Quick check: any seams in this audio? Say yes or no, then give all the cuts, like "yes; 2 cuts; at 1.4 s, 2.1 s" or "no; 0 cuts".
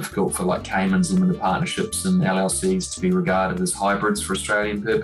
no; 0 cuts